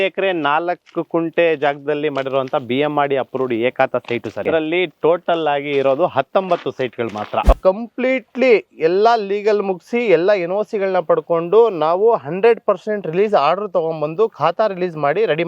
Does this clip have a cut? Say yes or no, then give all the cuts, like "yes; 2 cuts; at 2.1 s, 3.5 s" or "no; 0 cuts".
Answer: yes; 2 cuts; at 4.4 s, 7.6 s